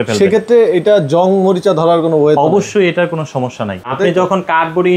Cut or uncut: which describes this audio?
cut